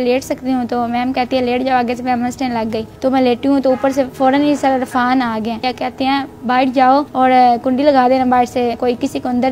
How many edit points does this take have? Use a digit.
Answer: 5